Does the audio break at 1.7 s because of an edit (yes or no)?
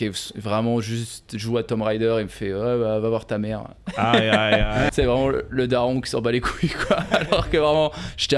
no